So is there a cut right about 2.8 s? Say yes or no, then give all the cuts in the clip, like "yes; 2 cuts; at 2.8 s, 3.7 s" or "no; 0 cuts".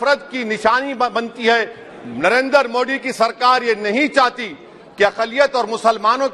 no; 1 cut; at 5.4 s